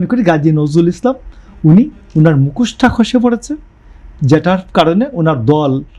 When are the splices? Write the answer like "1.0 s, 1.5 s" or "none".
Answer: none

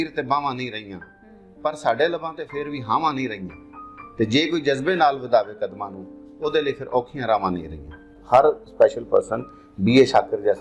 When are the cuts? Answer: 8.1 s

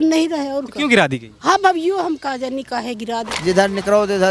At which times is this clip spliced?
3.3 s

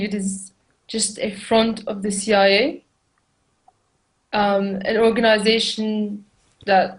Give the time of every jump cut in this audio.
2.5 s

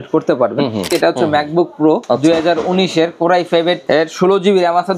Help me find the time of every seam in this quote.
0.9 s, 2.0 s, 3.8 s

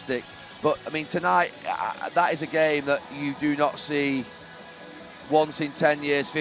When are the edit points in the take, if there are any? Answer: none

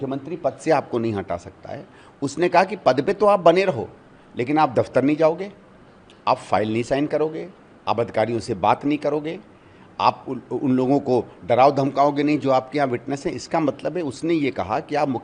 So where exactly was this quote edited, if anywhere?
none

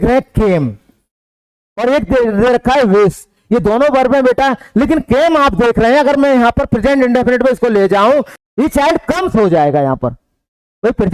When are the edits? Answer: 8.4 s

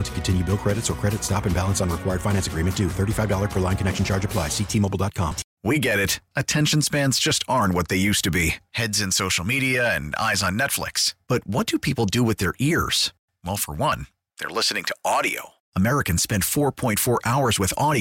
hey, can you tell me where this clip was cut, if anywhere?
5.5 s

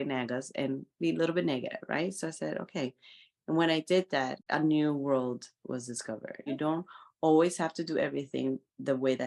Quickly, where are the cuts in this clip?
4.4 s, 6.5 s

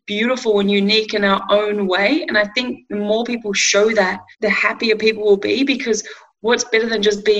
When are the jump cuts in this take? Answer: none

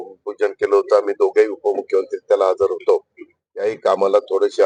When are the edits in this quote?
none

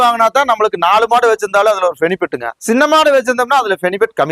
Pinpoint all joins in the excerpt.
2.5 s

